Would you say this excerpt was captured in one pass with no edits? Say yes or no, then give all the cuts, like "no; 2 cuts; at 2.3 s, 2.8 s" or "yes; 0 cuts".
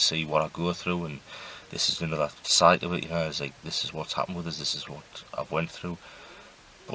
yes; 0 cuts